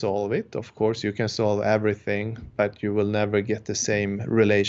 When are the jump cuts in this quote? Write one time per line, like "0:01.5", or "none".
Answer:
none